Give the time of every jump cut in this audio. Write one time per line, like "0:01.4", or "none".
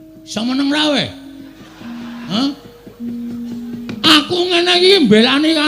0:02.3